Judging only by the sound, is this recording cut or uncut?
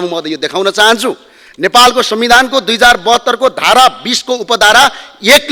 uncut